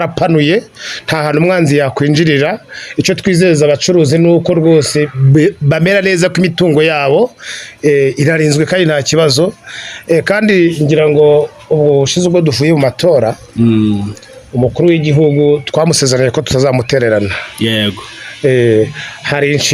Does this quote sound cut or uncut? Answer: uncut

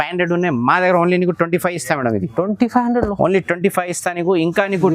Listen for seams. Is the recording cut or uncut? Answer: uncut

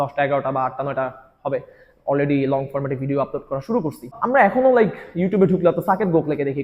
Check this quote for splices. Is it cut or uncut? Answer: cut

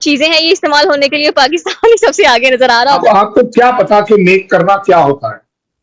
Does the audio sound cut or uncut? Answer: cut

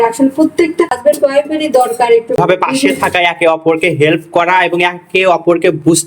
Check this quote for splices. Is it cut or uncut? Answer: cut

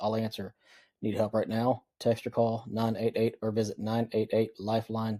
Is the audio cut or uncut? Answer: uncut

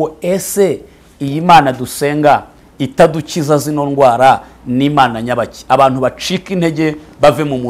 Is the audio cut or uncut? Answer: uncut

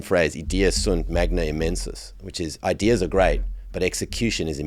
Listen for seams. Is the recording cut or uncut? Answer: uncut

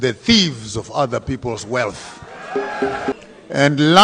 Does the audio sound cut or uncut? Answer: cut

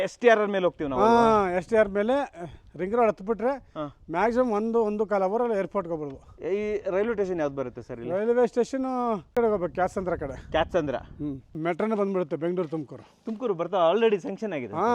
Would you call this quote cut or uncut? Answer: cut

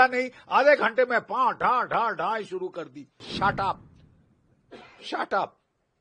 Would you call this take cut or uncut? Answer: cut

